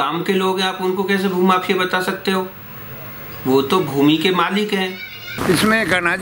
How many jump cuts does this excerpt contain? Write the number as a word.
one